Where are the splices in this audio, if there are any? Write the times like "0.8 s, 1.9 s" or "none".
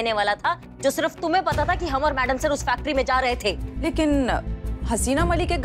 3.7 s

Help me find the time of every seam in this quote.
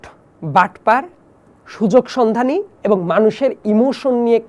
none

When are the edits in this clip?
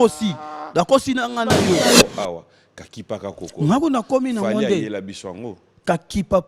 1.9 s

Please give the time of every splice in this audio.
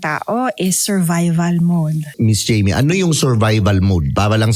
2.1 s

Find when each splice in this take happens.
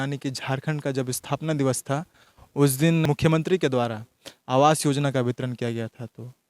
3.0 s

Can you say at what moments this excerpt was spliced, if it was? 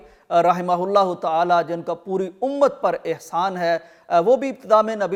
none

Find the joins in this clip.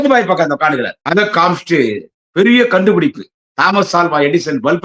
0.9 s

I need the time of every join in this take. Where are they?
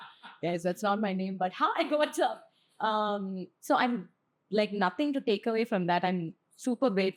none

